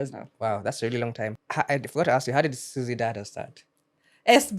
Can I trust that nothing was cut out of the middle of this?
no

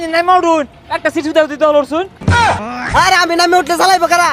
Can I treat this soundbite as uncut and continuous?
no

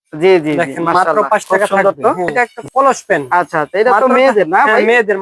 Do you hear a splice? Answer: yes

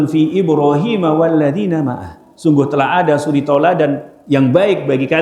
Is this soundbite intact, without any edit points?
no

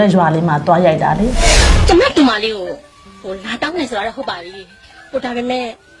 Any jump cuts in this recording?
yes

